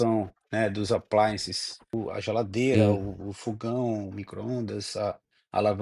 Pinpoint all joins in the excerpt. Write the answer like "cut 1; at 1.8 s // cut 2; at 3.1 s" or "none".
cut 1; at 1.9 s